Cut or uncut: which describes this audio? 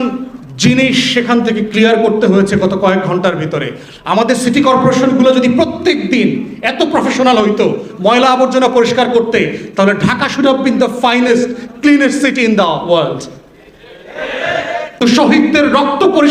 cut